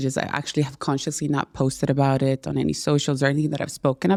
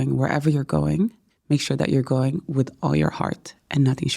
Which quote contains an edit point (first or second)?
second